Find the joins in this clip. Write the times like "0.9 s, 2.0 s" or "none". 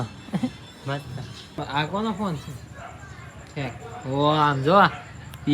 1.6 s

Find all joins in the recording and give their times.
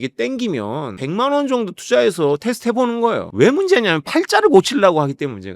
1.0 s

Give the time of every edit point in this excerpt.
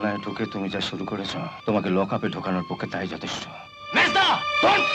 1.6 s

